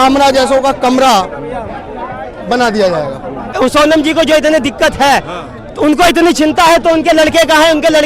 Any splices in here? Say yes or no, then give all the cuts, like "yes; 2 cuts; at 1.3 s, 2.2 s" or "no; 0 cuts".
yes; 1 cut; at 3.5 s